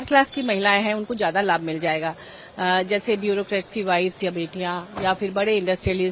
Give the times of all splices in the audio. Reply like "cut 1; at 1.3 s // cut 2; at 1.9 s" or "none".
none